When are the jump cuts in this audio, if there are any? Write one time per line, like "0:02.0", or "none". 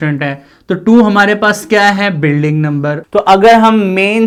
none